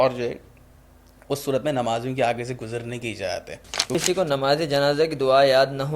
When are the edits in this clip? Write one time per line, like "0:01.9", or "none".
0:03.9